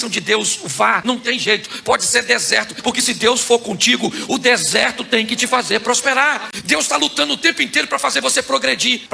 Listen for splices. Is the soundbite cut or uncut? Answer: cut